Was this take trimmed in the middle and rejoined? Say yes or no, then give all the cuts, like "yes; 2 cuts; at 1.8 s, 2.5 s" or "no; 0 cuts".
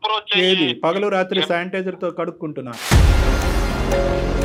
no; 0 cuts